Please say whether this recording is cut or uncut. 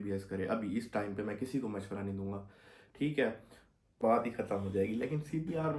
cut